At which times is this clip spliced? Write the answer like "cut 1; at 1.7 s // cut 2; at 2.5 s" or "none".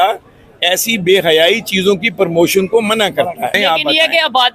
cut 1; at 3.6 s